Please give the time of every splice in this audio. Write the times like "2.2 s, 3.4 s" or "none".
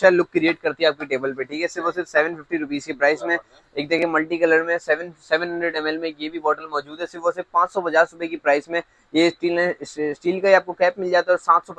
none